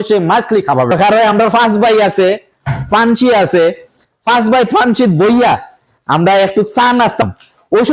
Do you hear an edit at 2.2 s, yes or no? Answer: no